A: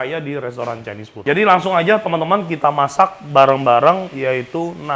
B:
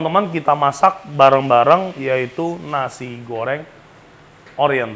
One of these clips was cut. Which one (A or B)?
A